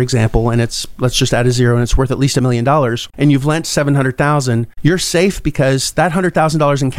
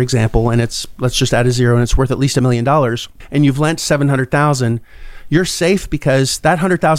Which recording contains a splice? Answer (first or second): first